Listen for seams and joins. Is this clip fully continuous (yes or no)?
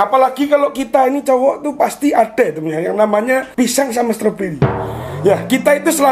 no